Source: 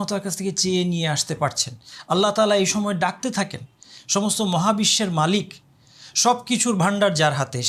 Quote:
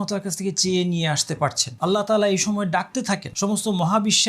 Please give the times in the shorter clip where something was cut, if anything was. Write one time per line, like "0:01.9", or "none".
0:01.7
0:03.3